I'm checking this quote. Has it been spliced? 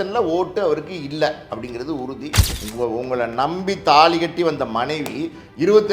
yes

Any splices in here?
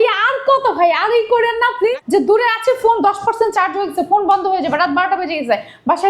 yes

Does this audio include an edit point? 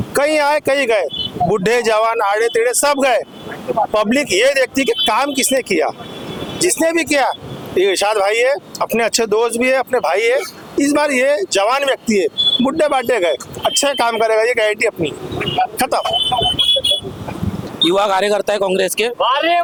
no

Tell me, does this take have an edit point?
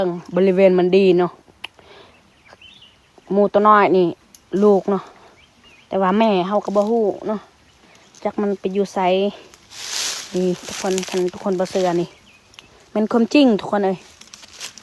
no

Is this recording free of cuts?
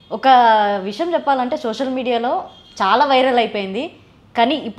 yes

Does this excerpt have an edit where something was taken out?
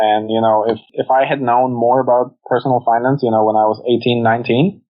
yes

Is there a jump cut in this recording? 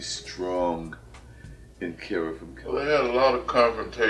yes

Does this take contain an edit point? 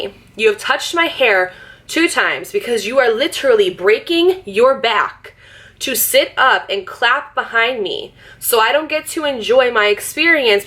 no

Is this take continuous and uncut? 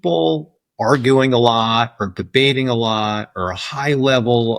yes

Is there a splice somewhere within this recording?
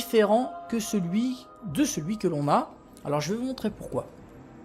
yes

